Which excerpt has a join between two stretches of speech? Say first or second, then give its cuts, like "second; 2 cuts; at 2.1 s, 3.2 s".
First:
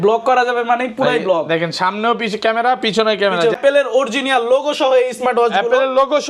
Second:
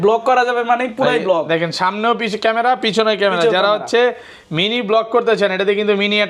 first; 1 cut; at 3.6 s